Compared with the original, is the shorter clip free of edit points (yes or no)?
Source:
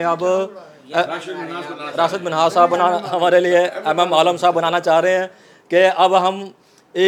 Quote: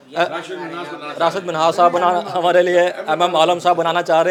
yes